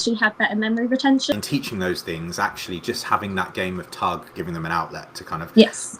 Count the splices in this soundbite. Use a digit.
2